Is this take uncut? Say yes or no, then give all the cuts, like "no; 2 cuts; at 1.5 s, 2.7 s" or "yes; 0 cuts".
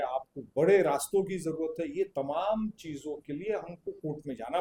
yes; 0 cuts